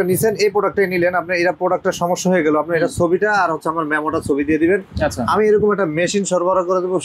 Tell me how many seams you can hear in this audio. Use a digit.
0